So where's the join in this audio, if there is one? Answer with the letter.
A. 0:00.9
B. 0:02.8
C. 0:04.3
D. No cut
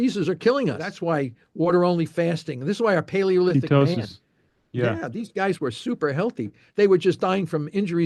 A